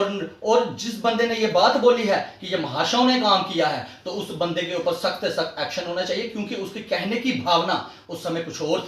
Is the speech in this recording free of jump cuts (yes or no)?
yes